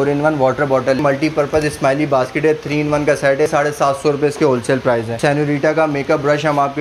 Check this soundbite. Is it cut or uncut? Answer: cut